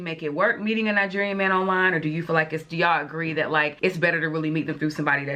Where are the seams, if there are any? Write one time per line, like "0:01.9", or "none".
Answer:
none